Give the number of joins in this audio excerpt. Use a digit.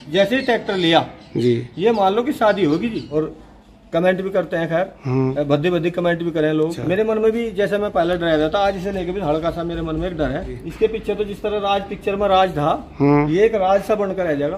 3